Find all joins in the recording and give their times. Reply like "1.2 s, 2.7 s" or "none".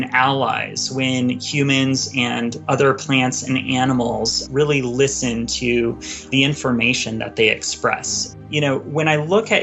2.6 s, 4.4 s, 6.3 s, 8.2 s